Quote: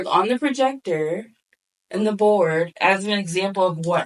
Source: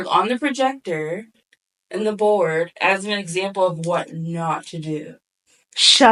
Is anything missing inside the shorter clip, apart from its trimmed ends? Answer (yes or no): no